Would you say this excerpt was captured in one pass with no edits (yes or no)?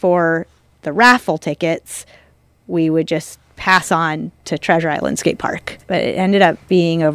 no